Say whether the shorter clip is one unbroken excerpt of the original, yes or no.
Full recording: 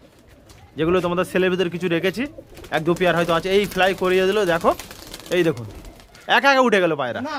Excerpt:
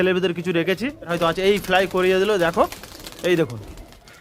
no